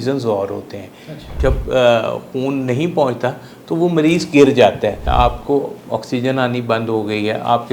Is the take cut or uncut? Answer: cut